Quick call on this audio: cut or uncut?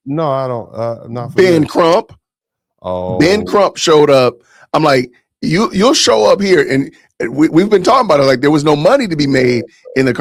uncut